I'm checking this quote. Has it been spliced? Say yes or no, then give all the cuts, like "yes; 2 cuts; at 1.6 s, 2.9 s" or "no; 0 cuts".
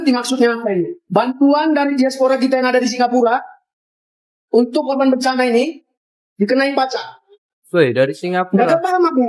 no; 0 cuts